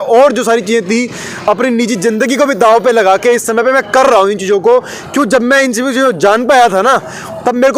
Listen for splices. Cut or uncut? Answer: uncut